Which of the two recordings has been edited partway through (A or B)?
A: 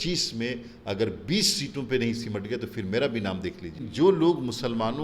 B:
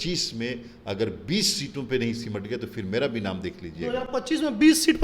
A